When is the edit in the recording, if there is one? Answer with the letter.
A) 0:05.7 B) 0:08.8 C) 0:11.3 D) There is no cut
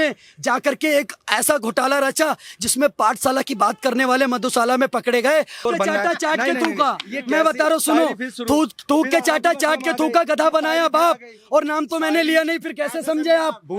A